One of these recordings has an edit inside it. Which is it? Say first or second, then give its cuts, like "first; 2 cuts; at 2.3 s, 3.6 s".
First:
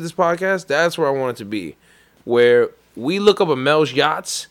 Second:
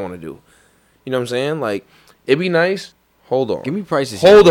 second; 1 cut; at 2.9 s